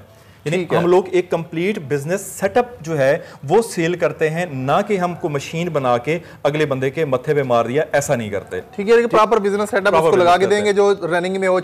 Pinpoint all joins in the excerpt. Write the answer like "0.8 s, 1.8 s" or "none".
none